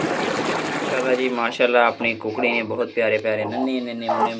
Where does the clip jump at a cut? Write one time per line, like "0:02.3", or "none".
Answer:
0:00.9